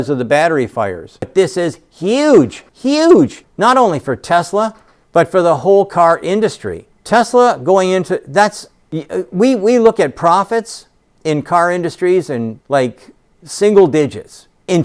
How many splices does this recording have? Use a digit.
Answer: 1